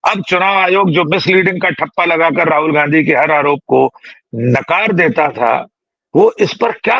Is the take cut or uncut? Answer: uncut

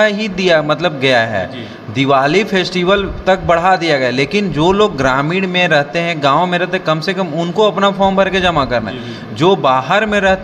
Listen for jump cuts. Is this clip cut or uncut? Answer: uncut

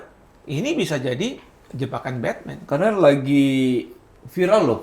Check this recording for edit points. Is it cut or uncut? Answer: uncut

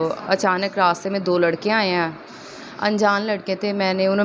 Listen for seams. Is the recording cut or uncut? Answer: uncut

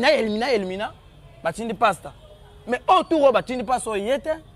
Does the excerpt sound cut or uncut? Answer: uncut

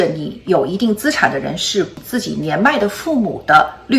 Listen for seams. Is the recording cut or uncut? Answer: cut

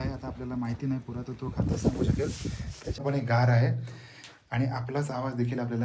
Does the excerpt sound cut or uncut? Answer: cut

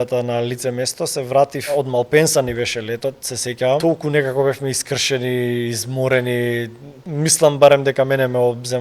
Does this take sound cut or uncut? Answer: cut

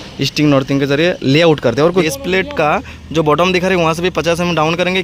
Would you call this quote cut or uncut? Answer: cut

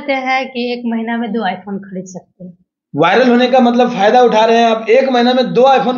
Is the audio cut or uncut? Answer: uncut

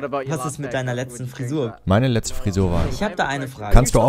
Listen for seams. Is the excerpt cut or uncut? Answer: cut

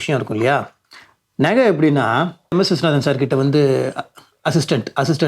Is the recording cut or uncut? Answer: cut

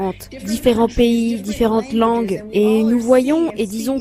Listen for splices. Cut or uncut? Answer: uncut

